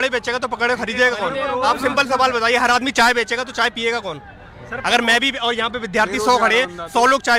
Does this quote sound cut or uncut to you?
uncut